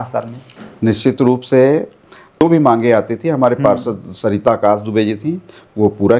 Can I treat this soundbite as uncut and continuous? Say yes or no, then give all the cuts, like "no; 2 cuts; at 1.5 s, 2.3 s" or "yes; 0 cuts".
no; 1 cut; at 2.4 s